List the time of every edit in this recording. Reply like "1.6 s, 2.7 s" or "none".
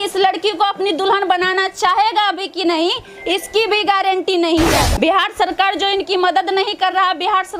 4.8 s

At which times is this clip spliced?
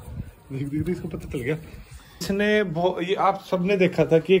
2.2 s

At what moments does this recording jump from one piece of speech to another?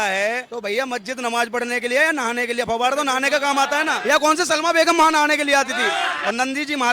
4.0 s, 6.1 s

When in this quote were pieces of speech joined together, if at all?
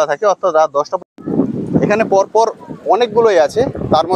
1.1 s

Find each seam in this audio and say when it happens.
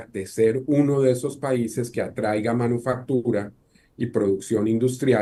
none

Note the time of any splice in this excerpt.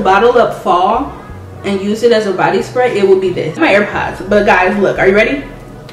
3.6 s

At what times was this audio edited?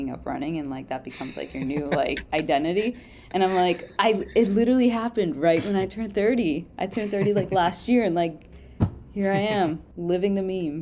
9.9 s

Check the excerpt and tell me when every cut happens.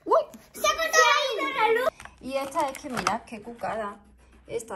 1.9 s

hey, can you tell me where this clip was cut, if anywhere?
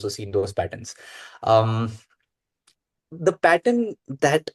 none

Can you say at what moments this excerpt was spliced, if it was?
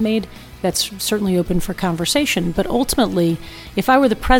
1.6 s

